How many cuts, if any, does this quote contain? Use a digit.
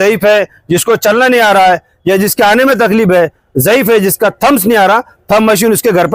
0